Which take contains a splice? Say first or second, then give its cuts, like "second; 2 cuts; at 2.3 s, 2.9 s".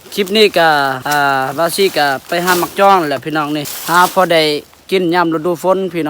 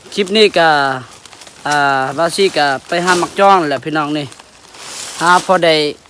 first; 2 cuts; at 1.0 s, 3.7 s